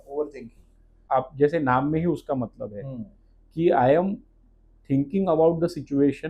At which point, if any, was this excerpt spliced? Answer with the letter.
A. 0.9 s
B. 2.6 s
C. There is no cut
A